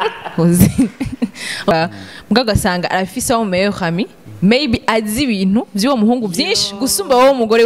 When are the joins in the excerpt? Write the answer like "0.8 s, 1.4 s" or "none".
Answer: 1.7 s